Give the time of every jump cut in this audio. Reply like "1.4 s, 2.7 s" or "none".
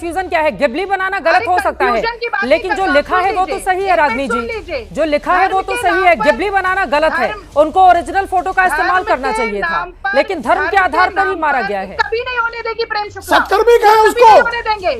11.9 s